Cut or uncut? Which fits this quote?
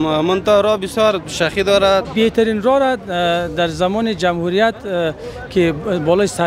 cut